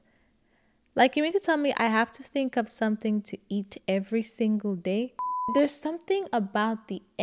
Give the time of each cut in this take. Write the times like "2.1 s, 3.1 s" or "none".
5.5 s